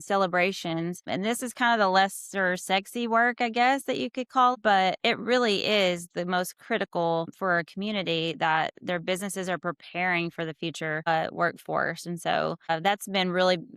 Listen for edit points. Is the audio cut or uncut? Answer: cut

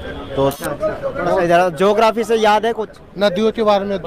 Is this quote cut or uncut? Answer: cut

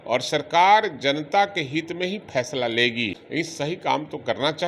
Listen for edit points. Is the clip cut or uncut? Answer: cut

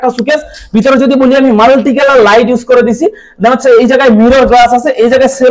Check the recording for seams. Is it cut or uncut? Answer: uncut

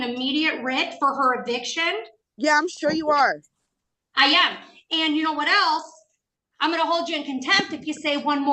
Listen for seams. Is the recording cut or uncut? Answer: uncut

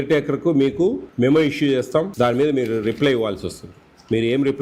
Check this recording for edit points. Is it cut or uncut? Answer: cut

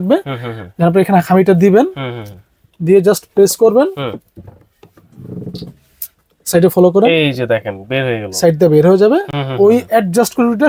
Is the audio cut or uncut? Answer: uncut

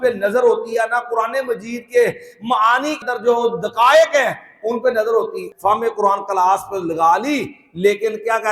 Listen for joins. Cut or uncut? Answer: cut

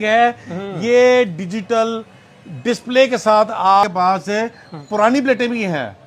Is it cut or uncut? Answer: cut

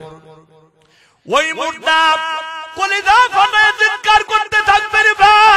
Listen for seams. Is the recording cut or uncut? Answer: uncut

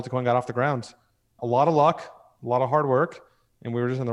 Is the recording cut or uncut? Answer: uncut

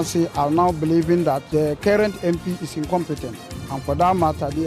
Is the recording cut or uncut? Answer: cut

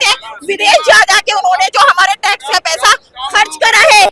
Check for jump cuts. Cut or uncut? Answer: uncut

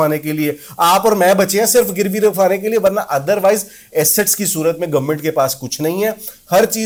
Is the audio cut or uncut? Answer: uncut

